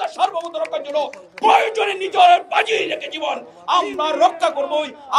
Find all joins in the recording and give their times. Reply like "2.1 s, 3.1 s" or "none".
none